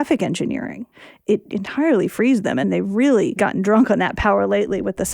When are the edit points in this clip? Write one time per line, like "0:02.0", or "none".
0:01.3
0:02.6
0:03.4